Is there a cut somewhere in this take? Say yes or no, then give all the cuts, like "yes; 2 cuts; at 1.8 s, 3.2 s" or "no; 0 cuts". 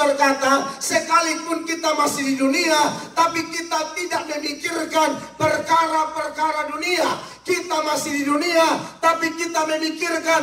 no; 0 cuts